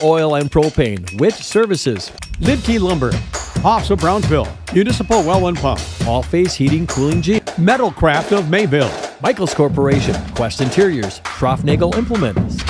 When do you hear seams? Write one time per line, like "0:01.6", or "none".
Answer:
0:07.4